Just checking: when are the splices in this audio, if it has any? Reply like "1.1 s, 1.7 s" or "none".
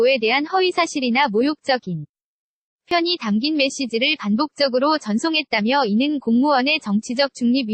2.9 s